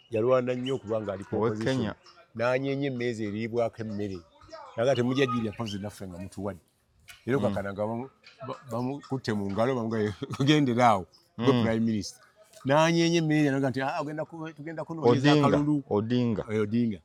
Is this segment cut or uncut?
uncut